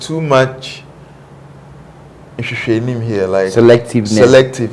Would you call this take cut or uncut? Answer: uncut